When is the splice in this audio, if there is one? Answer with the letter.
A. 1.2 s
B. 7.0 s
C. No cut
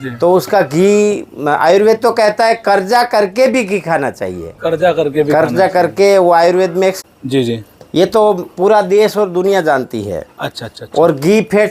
B